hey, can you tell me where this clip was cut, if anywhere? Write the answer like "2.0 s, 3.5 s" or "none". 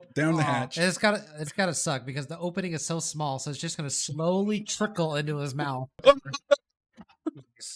5.9 s